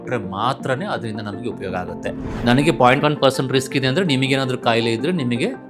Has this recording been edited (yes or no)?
yes